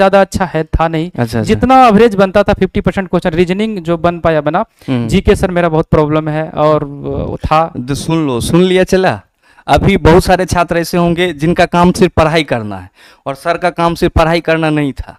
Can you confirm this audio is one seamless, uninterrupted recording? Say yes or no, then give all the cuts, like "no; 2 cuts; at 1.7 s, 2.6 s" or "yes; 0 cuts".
yes; 0 cuts